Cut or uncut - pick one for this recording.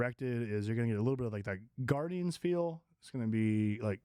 uncut